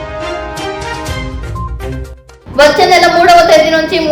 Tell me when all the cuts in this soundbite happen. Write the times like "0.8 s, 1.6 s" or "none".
none